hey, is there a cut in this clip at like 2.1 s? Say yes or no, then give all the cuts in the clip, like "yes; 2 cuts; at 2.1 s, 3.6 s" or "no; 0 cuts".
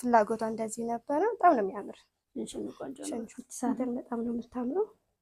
no; 1 cut; at 3.3 s